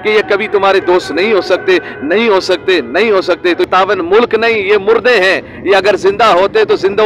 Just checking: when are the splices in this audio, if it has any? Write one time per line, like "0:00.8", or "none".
0:03.6